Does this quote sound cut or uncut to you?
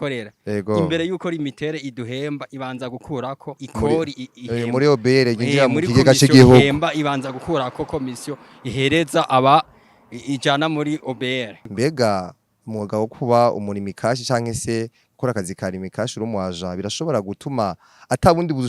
cut